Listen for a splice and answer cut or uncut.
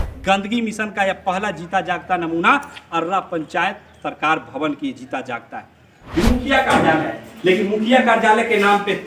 cut